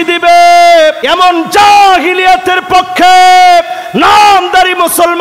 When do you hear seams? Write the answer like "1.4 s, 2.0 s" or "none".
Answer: 1.0 s